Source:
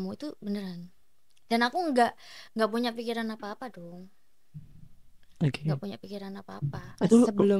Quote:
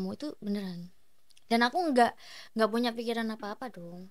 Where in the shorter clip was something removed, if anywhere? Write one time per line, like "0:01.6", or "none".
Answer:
none